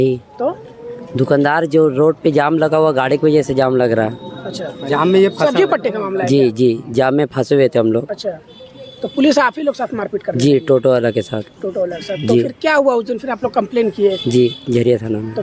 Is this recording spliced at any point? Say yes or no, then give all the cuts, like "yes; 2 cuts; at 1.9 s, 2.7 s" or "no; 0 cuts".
no; 0 cuts